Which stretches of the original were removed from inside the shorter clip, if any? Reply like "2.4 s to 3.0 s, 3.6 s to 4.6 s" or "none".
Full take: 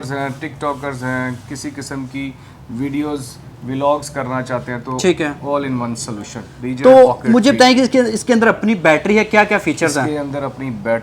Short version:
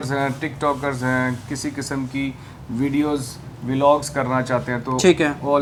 none